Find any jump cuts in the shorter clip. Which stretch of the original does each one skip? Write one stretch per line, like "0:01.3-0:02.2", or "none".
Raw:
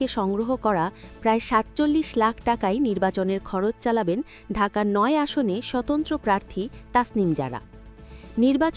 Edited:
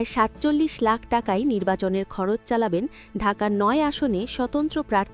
none